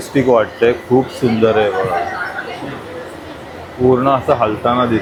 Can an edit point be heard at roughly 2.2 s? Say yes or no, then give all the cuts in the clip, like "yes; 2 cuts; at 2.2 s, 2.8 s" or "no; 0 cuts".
no; 0 cuts